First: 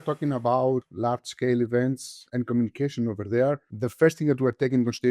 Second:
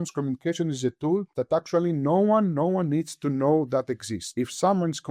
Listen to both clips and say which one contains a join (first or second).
first